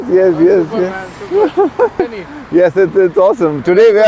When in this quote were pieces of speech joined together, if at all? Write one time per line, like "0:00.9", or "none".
0:02.0